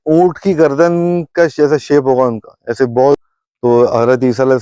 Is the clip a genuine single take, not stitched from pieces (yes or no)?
no